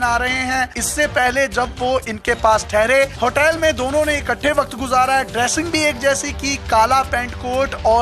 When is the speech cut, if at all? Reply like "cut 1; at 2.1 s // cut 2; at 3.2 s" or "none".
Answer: cut 1; at 3.1 s